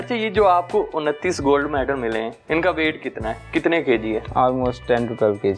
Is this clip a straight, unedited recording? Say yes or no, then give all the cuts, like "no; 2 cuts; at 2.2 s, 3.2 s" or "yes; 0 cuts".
yes; 0 cuts